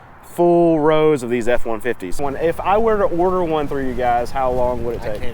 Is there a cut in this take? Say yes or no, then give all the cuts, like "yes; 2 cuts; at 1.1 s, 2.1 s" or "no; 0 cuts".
yes; 1 cut; at 2.2 s